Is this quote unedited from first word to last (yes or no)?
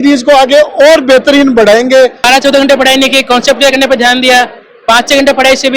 no